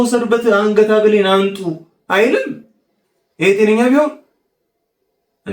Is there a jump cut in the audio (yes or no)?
no